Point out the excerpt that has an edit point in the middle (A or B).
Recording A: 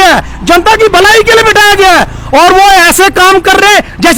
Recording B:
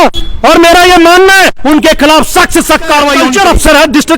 B